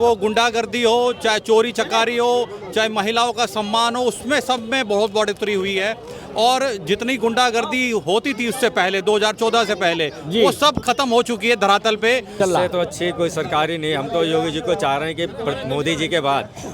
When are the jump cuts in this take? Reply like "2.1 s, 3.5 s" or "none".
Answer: 12.3 s